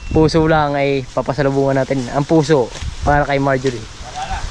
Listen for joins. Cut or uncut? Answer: uncut